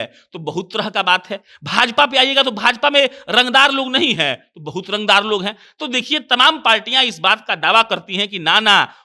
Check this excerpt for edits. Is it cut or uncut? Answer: uncut